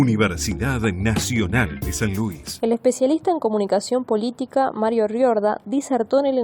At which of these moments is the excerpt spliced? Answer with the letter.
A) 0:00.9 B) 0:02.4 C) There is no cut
B